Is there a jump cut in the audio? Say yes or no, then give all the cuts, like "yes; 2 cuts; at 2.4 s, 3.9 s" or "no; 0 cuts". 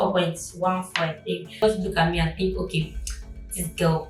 yes; 1 cut; at 1.6 s